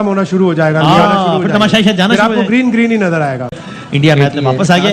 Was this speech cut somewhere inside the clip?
yes; 1 cut; at 3.5 s

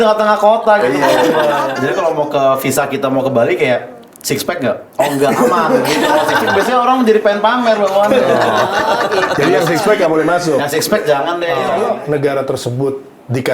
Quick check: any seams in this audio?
yes; 2 cuts; at 1.7 s, 11.7 s

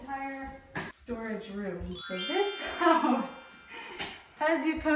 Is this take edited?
yes; 2 cuts; at 1.0 s, 2.0 s

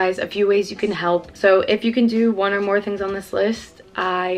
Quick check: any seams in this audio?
no; 0 cuts

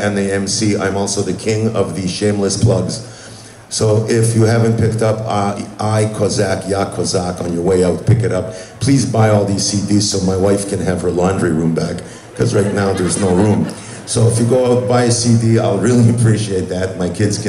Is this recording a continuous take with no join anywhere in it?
yes; 0 cuts

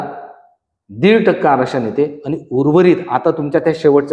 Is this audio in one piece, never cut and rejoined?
yes; 0 cuts

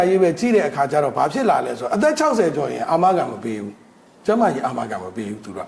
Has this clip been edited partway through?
no; 0 cuts

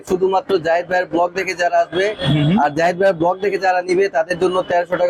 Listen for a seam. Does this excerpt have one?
no; 0 cuts

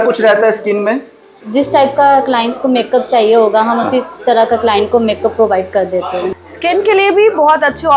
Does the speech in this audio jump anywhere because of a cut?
yes; 2 cuts; at 1.4 s, 6.3 s

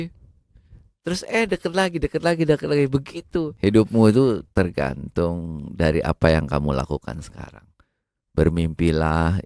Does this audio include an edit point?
yes; 1 cut; at 3.5 s

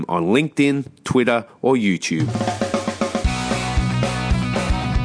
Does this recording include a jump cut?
yes; 1 cut; at 2.3 s

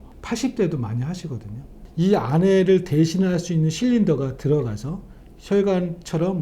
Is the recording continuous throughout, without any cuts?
no; 1 cut; at 1.8 s

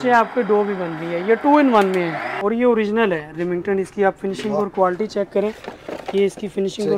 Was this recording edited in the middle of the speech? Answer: yes; 1 cut; at 2.3 s

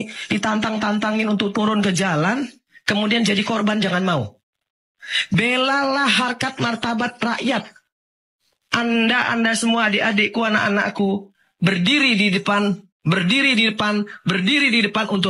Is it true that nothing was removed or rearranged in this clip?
yes; 0 cuts

